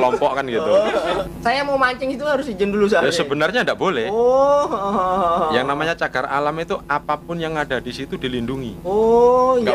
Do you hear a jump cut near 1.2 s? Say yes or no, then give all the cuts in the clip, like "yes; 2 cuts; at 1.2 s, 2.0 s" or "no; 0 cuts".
yes; 1 cut; at 1.2 s